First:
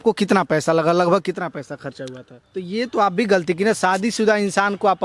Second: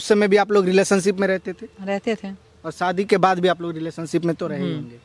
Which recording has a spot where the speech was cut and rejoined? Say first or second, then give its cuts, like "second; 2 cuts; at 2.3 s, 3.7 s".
first; 1 cut; at 2.3 s